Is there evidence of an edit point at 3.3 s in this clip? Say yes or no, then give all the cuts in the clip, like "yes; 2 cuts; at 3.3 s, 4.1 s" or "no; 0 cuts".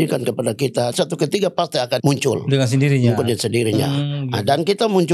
no; 2 cuts; at 0.9 s, 2.0 s